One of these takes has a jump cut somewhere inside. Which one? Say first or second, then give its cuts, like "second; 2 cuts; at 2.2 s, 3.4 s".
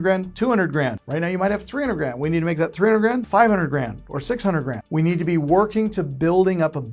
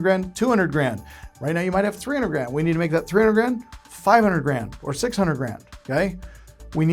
first; 3 cuts; at 1.0 s, 3.2 s, 4.8 s